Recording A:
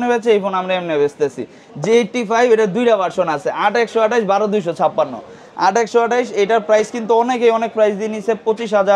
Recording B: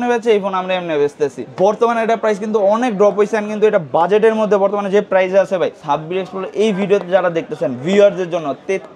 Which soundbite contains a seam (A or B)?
B